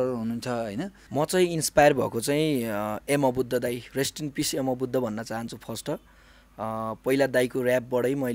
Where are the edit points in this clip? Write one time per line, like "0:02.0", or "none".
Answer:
0:01.0